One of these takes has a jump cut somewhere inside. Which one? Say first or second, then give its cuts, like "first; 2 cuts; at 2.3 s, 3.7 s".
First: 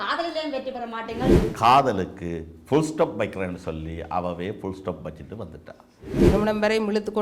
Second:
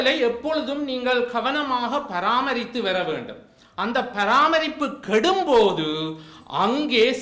first; 2 cuts; at 1.4 s, 6.3 s